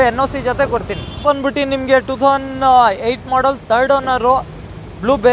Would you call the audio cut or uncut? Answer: cut